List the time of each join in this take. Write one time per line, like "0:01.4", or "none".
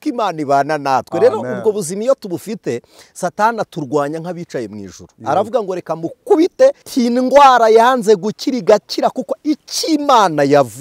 0:06.8